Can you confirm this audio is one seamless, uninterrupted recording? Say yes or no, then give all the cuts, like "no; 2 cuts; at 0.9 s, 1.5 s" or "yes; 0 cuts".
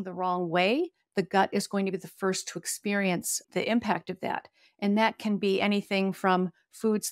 no; 1 cut; at 3.4 s